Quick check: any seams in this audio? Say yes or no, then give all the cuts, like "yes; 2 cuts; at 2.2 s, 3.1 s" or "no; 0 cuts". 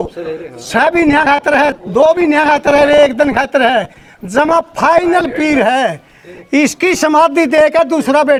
no; 0 cuts